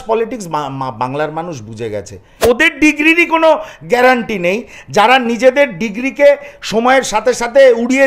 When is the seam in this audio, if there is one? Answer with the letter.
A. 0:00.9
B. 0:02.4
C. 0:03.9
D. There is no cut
B